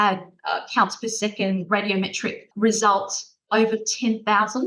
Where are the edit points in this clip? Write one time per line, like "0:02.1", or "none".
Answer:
0:02.4
0:03.4